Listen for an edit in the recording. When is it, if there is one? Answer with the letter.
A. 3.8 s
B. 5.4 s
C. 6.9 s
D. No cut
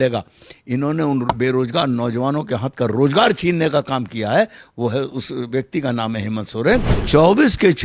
C